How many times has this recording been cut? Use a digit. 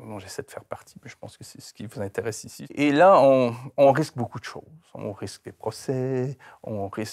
1